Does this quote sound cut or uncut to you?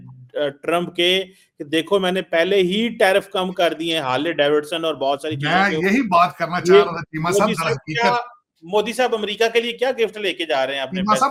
uncut